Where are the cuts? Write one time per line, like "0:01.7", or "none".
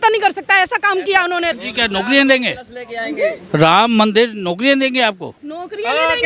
0:01.6